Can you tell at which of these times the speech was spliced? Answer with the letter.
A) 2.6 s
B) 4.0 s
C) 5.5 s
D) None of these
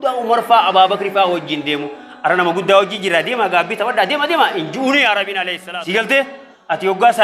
C